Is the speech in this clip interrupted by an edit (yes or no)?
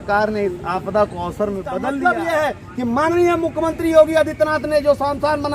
yes